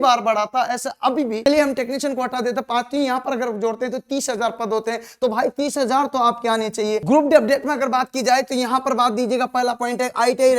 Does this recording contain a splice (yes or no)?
yes